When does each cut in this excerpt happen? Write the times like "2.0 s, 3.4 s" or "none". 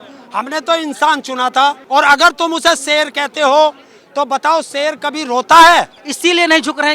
1.8 s, 6.0 s